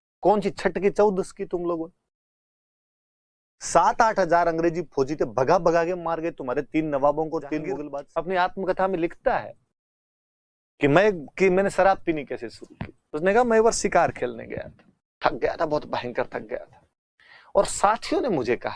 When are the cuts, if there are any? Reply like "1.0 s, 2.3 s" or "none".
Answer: 7.9 s